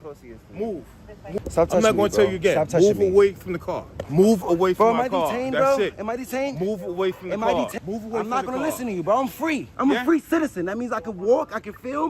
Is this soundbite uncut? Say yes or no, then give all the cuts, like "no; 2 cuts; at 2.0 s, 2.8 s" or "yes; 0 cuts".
no; 4 cuts; at 1.4 s, 4.0 s, 7.7 s, 9.7 s